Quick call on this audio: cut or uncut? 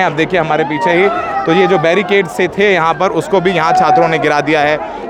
uncut